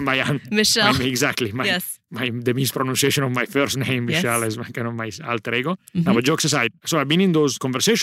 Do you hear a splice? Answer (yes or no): no